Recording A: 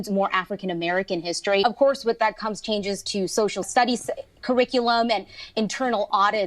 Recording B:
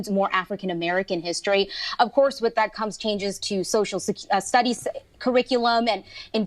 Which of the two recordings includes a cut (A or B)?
A